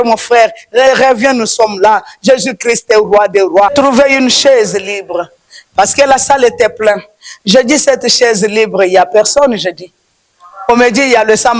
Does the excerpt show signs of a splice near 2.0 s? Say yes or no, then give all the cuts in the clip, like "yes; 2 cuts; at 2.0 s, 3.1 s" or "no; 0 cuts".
no; 1 cut; at 3.7 s